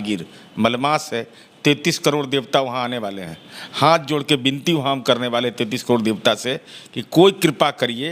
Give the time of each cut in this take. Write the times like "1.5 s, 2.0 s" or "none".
none